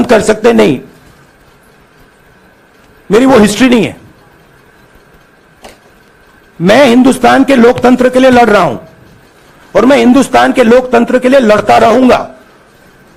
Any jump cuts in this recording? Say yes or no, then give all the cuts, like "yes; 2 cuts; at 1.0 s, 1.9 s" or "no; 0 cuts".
no; 0 cuts